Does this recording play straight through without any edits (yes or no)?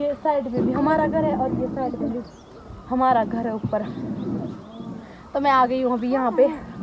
yes